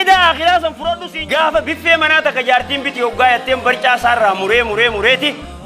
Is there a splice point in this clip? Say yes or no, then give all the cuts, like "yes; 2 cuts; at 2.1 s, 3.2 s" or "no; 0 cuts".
yes; 1 cut; at 1.1 s